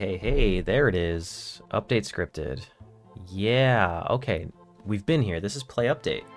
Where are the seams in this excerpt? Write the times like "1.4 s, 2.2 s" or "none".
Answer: none